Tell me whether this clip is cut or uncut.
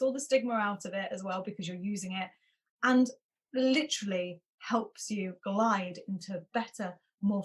uncut